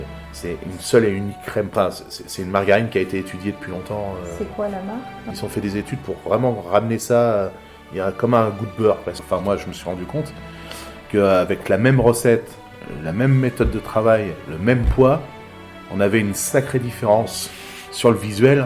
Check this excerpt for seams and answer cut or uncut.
cut